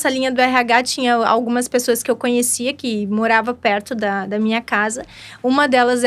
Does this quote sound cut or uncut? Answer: uncut